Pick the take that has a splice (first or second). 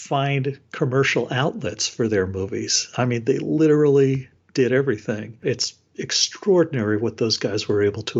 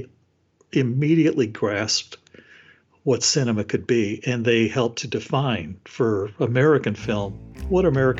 first